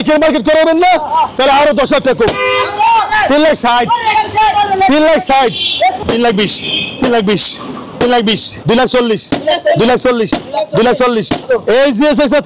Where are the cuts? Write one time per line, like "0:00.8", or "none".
0:06.0
0:08.6
0:11.4